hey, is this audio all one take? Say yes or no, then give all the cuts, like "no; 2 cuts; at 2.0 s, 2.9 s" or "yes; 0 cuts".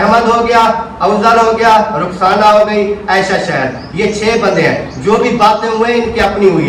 yes; 0 cuts